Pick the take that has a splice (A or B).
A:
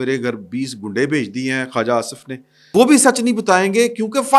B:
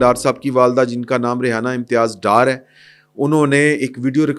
A